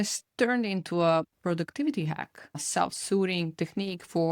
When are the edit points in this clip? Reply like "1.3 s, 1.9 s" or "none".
1.3 s, 2.6 s